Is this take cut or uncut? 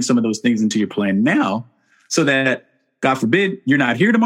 uncut